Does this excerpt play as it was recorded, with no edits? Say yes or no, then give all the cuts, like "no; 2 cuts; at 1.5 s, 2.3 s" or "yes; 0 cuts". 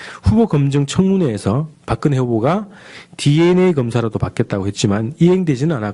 no; 1 cut; at 3.9 s